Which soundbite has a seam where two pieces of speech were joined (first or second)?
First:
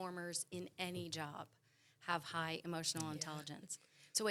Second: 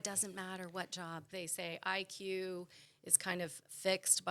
second